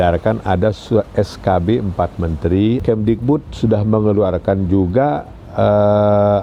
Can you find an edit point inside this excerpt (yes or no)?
yes